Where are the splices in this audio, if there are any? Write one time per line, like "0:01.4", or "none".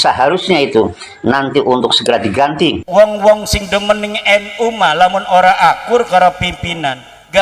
0:02.8

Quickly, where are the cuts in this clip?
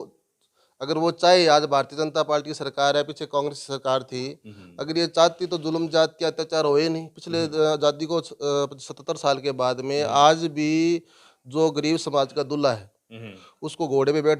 none

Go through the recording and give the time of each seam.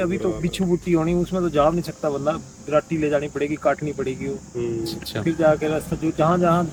none

